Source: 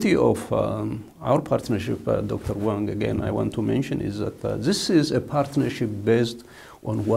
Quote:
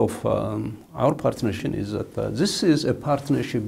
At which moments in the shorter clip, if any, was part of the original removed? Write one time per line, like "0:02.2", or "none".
0:01.6